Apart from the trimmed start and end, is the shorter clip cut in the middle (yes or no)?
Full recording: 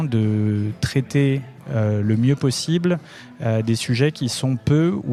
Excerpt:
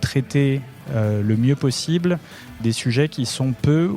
yes